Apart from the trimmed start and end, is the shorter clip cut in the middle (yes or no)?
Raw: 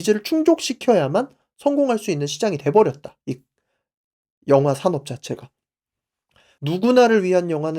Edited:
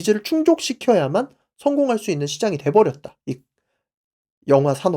no